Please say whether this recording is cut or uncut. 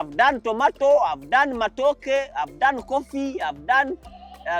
uncut